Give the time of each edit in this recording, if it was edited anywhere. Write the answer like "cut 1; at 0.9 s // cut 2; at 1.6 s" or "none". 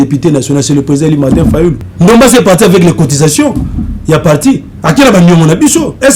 cut 1; at 1.9 s